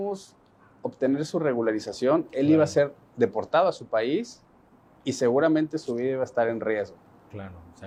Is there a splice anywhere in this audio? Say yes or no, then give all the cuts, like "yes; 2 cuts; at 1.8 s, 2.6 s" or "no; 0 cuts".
no; 0 cuts